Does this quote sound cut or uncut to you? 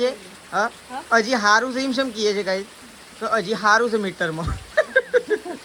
uncut